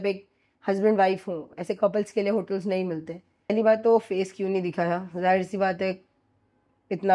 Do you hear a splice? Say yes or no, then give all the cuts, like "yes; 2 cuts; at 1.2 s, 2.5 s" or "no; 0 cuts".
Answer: yes; 1 cut; at 3.5 s